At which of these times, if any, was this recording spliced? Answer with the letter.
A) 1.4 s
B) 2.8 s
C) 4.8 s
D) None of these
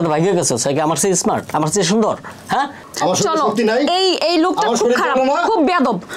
B